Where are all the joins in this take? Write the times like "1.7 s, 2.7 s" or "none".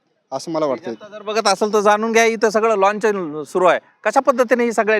none